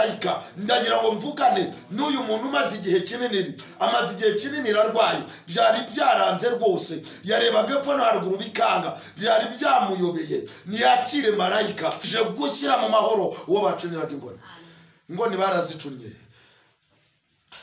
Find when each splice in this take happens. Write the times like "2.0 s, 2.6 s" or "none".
12.0 s